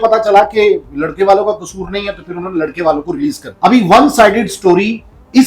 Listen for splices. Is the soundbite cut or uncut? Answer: cut